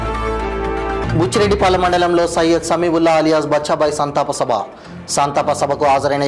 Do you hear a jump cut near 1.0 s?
yes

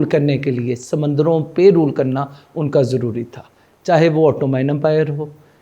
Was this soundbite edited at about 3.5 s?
no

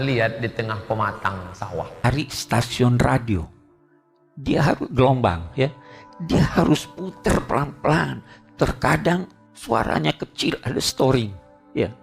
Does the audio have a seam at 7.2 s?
no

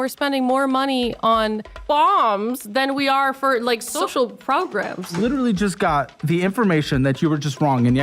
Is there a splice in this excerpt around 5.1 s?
yes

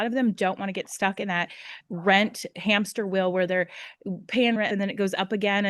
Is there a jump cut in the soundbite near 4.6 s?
yes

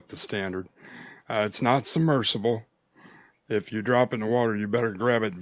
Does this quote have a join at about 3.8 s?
no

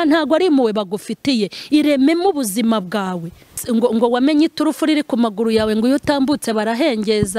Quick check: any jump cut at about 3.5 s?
yes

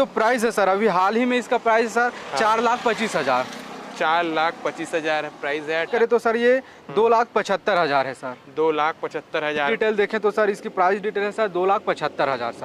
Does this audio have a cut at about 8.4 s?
no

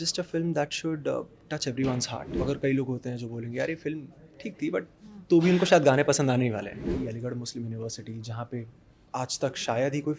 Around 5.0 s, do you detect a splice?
no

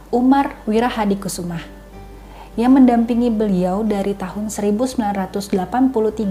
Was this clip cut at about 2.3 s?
no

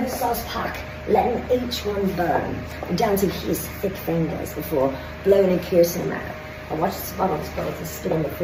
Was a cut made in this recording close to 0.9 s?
no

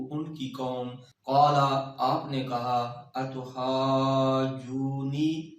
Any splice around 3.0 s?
no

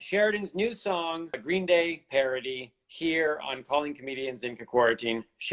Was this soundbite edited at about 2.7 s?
no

